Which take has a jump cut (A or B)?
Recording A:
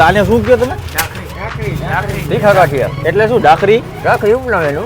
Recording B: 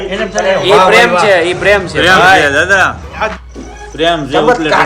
B